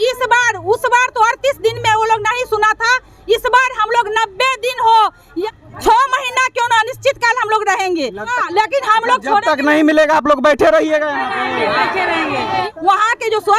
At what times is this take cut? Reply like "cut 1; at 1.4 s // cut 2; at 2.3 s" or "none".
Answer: cut 1; at 5.4 s // cut 2; at 8.3 s // cut 3; at 12.6 s